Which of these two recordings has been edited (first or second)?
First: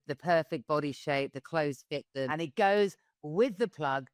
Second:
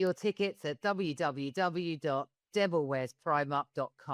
first